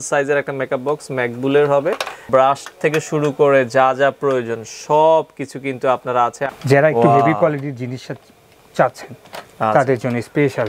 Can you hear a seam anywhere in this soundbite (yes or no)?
yes